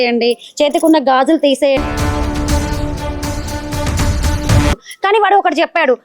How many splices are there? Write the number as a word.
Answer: one